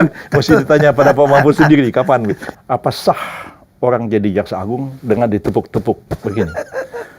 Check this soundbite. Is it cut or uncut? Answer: cut